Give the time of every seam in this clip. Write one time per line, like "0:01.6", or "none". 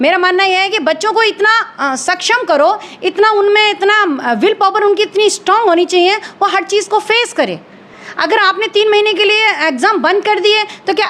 none